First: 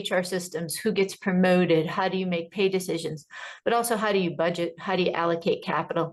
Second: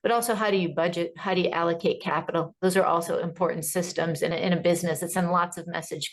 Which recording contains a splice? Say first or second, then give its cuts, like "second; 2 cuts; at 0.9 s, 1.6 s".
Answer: second; 1 cut; at 4.3 s